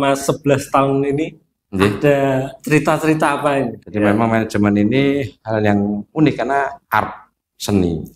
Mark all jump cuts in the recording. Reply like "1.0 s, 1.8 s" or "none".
3.8 s